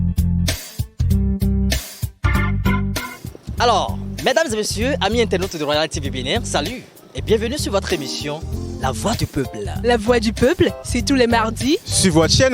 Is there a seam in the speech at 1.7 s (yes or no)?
yes